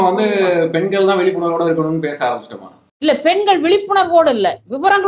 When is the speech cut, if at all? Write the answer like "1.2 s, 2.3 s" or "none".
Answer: none